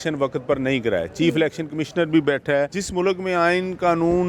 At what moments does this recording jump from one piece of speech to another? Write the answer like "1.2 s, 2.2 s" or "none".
2.8 s